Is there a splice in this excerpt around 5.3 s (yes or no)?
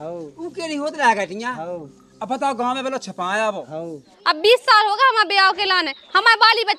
no